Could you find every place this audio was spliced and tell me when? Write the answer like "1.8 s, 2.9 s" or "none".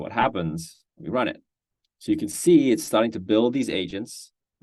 none